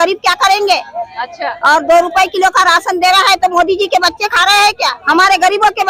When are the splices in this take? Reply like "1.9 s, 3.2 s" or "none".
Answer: none